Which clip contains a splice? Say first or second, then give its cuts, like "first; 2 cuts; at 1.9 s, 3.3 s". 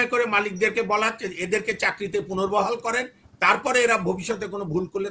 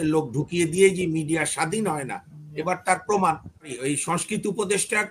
second; 1 cut; at 3.7 s